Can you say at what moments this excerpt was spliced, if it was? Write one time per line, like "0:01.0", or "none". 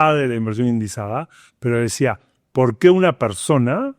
none

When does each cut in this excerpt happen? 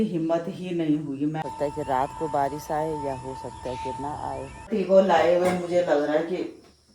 0:01.4
0:04.7

